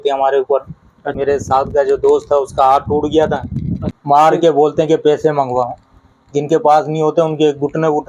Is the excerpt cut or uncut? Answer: cut